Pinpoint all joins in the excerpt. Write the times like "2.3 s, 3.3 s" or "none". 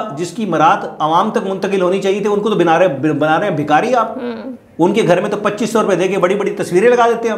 none